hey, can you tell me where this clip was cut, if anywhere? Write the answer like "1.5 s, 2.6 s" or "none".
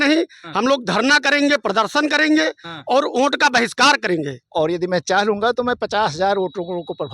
4.4 s